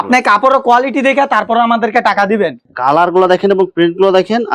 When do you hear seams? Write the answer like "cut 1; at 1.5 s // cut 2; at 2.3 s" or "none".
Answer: cut 1; at 2.7 s